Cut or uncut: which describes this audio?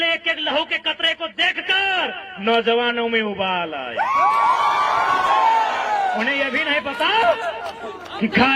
cut